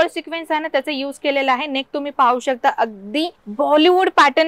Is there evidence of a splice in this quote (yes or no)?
yes